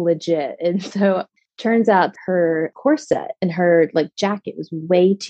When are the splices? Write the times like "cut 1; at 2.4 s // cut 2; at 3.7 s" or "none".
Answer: cut 1; at 1.3 s // cut 2; at 2.1 s